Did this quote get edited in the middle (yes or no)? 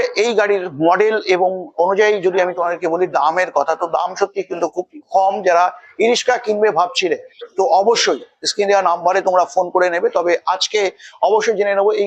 no